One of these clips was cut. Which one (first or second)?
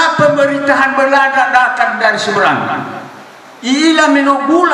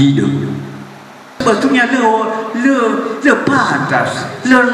second